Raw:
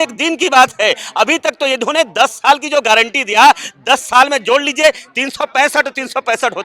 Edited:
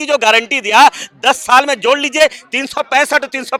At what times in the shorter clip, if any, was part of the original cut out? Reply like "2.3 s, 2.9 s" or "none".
none

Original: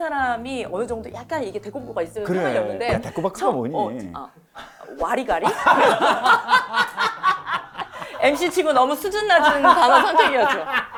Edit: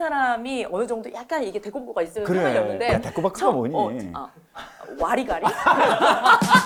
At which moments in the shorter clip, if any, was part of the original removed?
none

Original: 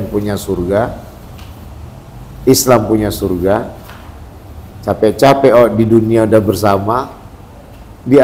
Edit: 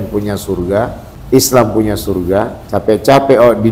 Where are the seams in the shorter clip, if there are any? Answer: 1.2 s, 2.6 s

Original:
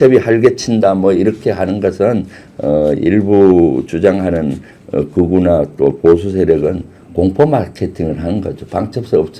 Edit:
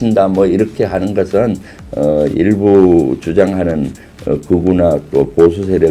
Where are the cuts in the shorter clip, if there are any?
none

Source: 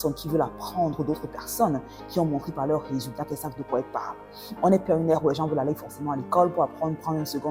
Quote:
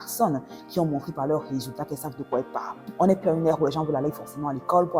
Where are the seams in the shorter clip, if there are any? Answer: 2.8 s

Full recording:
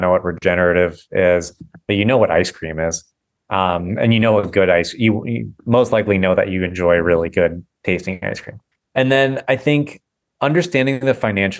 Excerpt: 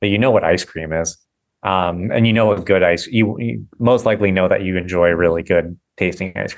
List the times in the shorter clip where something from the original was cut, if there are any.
none

